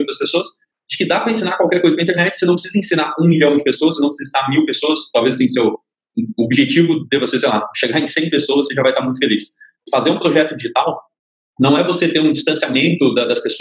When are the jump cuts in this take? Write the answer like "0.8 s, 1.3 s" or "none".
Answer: 9.9 s